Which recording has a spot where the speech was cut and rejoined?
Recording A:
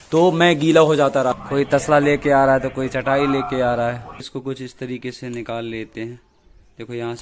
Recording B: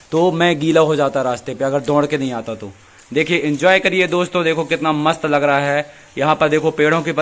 A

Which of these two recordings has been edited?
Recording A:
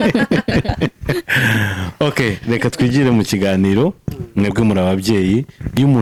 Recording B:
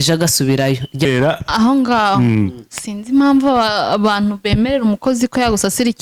B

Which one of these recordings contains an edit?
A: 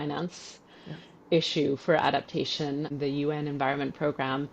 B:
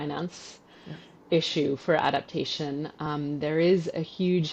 A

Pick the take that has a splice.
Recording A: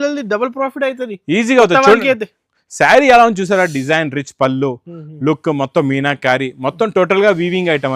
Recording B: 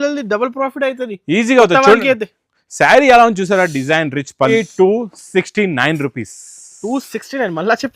B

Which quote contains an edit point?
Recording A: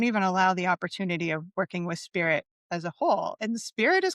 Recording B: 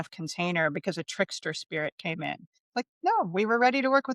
B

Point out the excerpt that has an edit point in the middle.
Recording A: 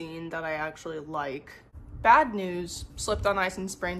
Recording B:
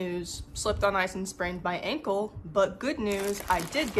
A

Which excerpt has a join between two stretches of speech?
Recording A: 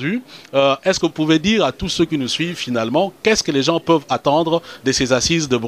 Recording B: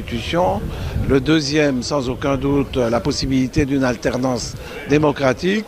B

